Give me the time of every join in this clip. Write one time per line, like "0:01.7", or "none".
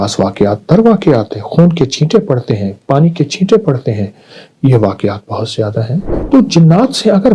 0:06.1